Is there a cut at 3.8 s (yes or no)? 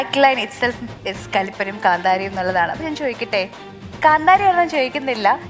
no